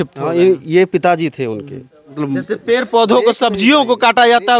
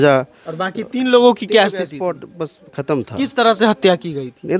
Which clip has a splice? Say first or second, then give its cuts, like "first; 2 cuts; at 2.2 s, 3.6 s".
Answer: first; 1 cut; at 2.1 s